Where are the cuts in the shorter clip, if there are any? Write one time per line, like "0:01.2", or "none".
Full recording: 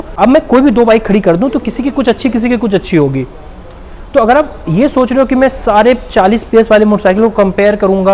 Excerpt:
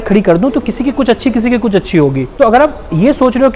0:02.2